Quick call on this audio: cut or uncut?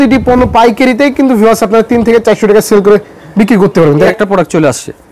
cut